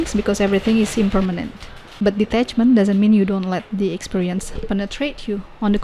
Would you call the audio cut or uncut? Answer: cut